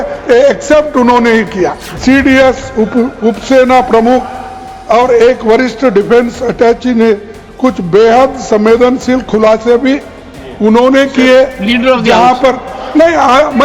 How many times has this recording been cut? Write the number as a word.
one